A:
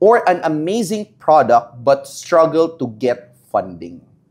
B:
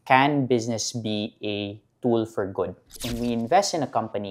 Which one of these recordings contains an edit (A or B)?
B